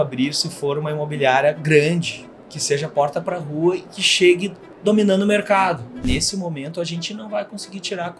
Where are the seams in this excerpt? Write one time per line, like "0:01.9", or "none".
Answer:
0:06.0